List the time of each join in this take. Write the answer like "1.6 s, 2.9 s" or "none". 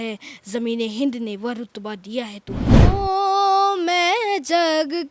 2.7 s